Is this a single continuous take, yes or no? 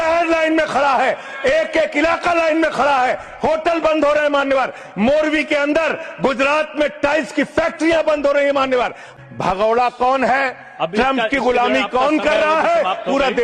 no